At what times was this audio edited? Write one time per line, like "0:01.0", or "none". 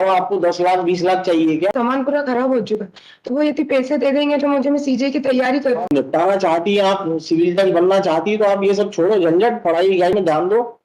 0:01.6
0:06.0